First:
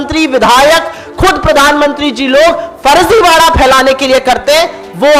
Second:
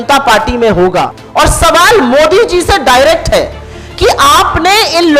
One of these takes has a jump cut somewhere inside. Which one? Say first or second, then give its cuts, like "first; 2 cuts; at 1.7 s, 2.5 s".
second; 1 cut; at 1.2 s